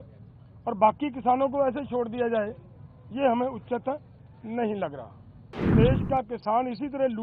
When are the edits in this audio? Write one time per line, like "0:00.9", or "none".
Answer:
0:05.7